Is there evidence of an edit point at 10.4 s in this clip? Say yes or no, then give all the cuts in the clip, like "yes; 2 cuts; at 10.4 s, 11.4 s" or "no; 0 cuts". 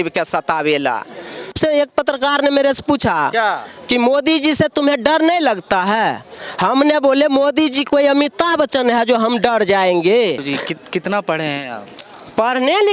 yes; 2 cuts; at 1.5 s, 10.4 s